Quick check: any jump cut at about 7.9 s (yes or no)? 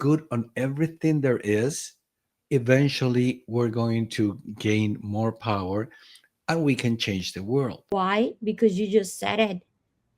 yes